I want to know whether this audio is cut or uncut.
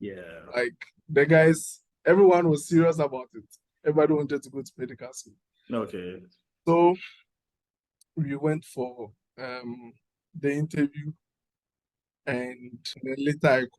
cut